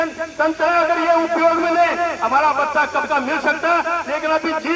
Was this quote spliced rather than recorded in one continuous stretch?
no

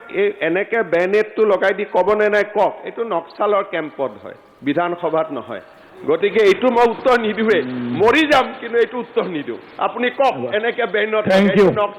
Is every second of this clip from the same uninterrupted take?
yes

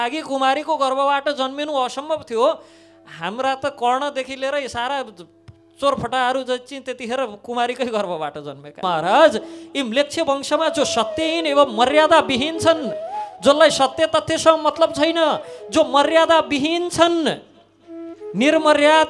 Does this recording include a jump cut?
yes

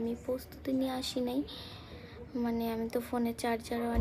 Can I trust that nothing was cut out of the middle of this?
yes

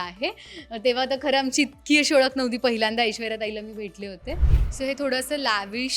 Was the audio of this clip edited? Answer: yes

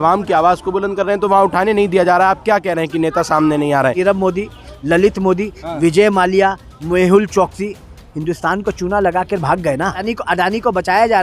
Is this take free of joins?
no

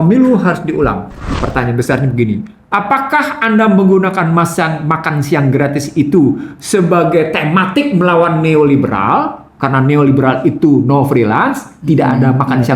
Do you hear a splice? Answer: yes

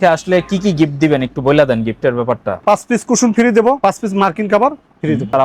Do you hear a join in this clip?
no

